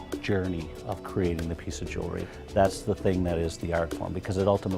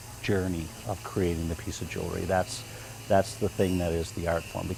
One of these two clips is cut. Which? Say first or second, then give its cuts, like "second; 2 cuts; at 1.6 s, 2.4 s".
first; 1 cut; at 2.2 s